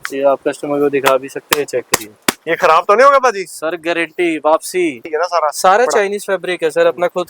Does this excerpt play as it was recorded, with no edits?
no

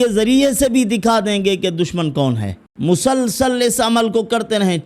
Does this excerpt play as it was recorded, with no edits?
no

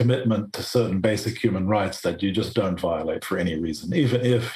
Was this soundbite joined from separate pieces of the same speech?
no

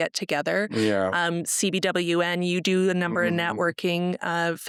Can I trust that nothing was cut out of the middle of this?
yes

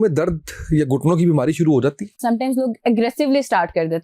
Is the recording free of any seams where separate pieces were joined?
no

